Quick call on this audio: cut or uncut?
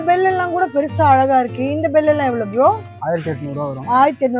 uncut